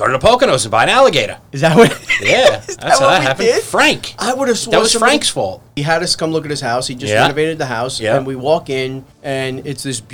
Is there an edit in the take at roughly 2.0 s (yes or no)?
no